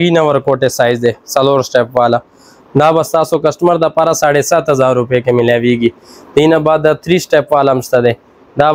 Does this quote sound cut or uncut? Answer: uncut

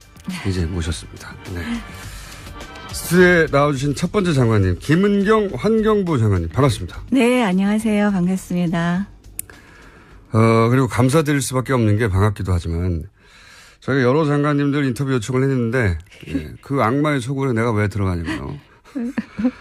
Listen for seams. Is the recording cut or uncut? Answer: uncut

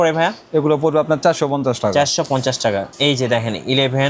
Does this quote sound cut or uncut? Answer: cut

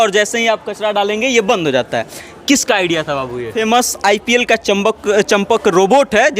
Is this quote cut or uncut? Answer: cut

